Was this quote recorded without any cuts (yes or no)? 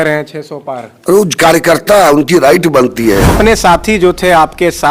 no